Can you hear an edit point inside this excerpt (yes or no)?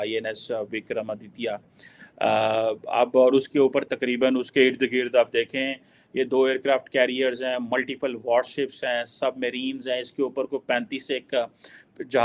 no